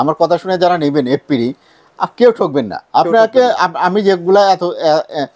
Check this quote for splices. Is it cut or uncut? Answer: uncut